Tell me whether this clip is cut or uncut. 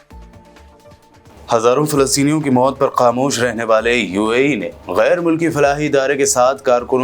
cut